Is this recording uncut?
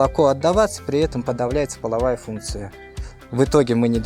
yes; 0 cuts

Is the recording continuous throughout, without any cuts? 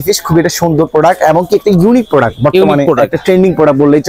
yes; 0 cuts

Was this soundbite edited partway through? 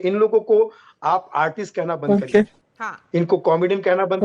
no; 0 cuts

